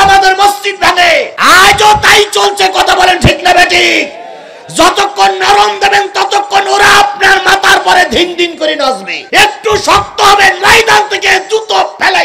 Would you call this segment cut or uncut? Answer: cut